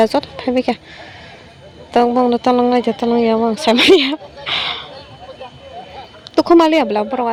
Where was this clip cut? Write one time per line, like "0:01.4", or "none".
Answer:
none